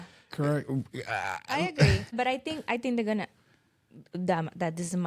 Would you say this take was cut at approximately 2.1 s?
yes; 1 cut; at 2.1 s

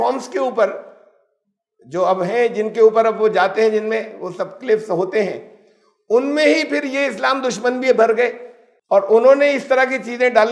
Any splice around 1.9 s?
no; 0 cuts

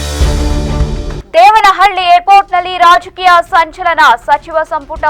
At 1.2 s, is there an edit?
yes; 1 cut; at 1.2 s

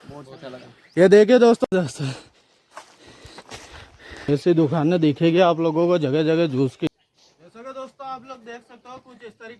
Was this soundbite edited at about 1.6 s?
yes; 2 cuts; at 1.6 s, 6.9 s

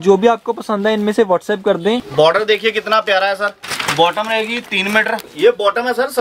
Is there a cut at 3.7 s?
yes; 3 cuts; at 2.1 s, 3.7 s, 5.3 s

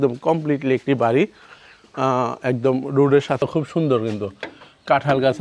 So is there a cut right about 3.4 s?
yes; 1 cut; at 3.4 s

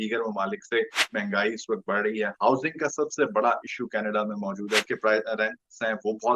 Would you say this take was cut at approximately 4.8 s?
yes; 2 cuts; at 1.1 s, 4.8 s

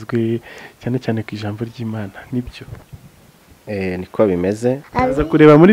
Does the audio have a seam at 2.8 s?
no; 1 cut; at 4.8 s

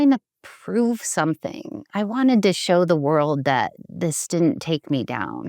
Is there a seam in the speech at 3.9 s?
no; 1 cut; at 1.8 s

